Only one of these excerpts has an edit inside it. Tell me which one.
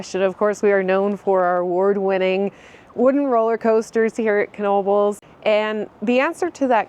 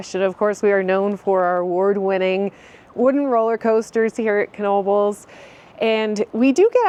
first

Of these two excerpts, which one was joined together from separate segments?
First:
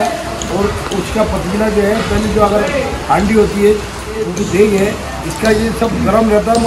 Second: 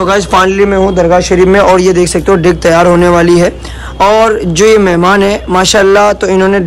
first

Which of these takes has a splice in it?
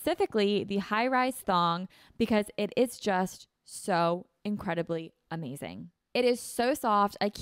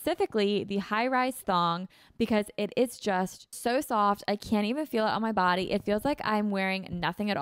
second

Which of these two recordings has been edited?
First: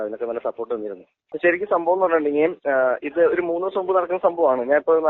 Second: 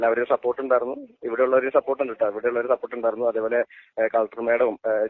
first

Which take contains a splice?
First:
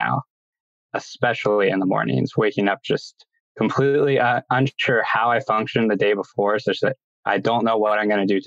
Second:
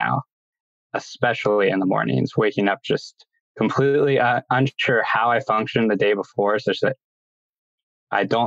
first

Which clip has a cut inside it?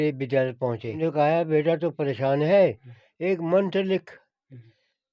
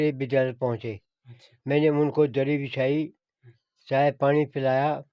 first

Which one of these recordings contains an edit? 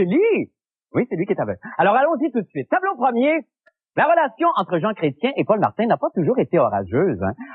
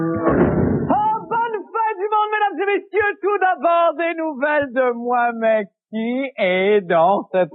second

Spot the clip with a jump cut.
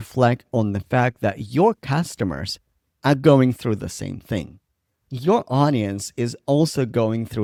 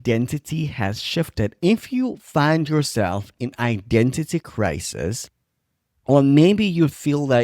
second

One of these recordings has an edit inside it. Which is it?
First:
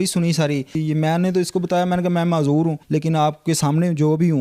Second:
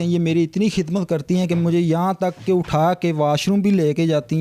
first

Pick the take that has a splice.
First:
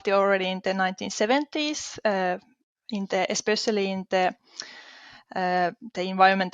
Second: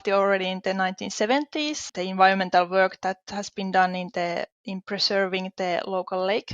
second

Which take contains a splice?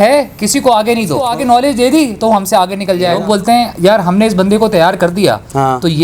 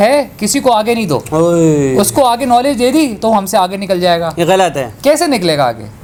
first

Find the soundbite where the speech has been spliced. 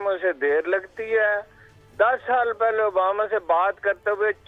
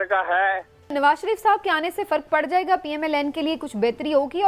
second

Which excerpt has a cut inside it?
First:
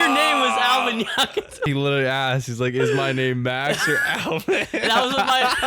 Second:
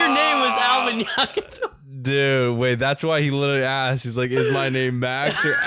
first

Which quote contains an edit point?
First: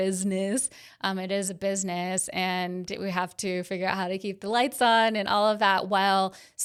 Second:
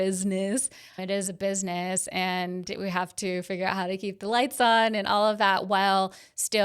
second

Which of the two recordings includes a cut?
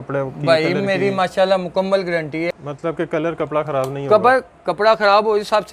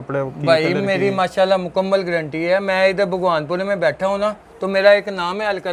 first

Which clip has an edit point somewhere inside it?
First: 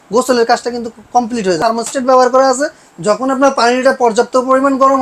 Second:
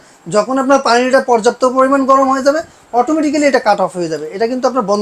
first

